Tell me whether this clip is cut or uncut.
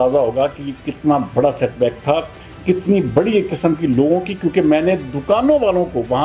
uncut